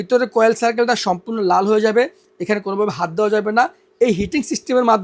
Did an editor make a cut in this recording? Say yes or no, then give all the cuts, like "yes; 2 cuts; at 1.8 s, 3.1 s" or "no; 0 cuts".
no; 0 cuts